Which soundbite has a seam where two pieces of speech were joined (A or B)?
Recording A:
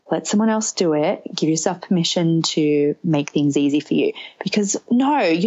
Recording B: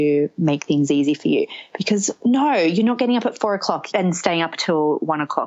B